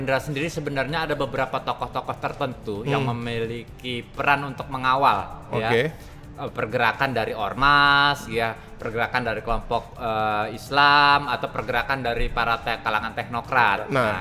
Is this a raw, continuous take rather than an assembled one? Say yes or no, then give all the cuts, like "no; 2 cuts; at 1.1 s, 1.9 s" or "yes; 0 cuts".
yes; 0 cuts